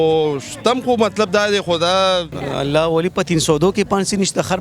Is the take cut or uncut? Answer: cut